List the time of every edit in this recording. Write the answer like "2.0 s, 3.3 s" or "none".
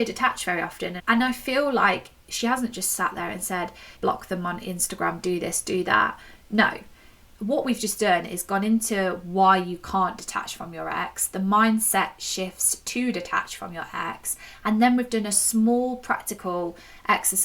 1.0 s